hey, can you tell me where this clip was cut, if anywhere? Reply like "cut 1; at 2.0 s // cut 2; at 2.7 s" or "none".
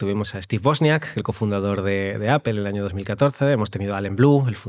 none